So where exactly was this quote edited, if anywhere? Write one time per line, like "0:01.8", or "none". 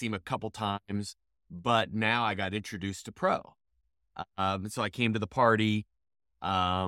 none